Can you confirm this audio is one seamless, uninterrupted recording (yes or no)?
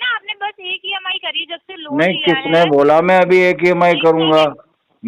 yes